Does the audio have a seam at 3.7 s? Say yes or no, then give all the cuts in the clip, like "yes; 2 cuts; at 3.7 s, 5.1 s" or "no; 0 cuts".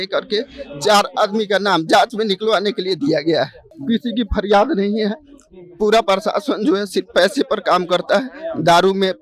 yes; 1 cut; at 3.7 s